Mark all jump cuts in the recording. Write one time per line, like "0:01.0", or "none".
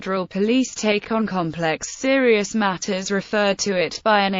none